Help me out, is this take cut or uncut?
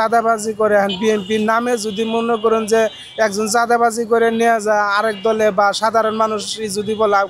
uncut